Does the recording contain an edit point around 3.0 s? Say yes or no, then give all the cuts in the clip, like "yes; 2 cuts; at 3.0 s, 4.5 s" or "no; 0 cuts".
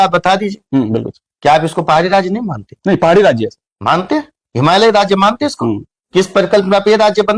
no; 0 cuts